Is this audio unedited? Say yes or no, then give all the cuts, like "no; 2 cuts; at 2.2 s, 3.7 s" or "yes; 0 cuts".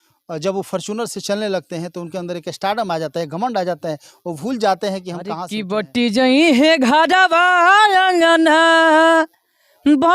no; 1 cut; at 5.5 s